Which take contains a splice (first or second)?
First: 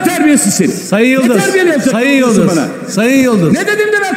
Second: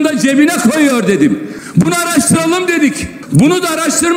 second